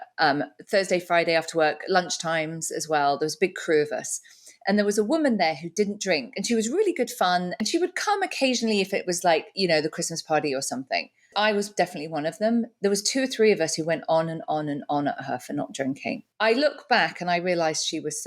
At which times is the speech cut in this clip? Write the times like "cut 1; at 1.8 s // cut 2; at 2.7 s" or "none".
cut 1; at 7.5 s // cut 2; at 11.3 s // cut 3; at 16.2 s